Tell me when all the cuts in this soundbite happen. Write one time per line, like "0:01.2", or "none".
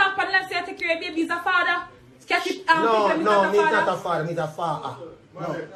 none